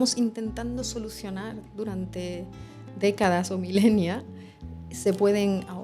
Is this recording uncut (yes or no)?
yes